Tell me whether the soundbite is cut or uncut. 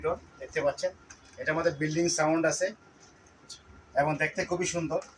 uncut